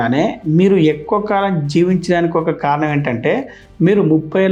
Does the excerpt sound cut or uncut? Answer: uncut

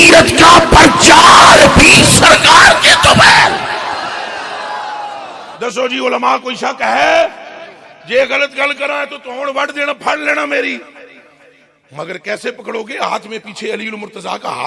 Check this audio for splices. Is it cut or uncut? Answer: cut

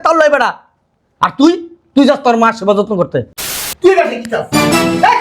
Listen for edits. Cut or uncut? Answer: cut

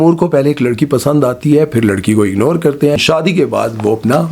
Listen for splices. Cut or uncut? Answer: uncut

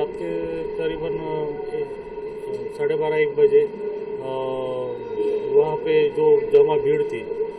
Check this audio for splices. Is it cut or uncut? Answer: uncut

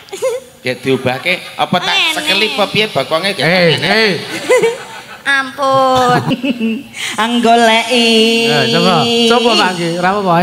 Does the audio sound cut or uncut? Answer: cut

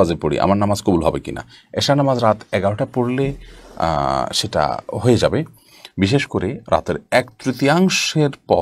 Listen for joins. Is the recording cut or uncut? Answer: uncut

